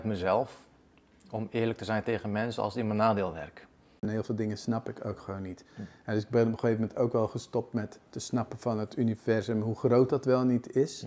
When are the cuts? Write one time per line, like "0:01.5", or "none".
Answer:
0:04.1